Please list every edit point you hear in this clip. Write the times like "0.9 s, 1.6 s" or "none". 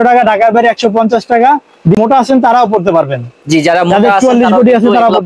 2.0 s